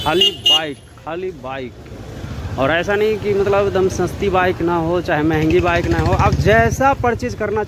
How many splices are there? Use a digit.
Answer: 0